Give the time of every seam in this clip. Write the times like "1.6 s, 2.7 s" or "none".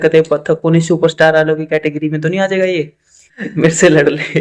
3.4 s